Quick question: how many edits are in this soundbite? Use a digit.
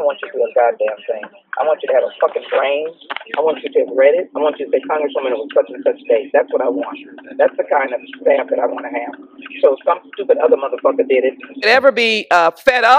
1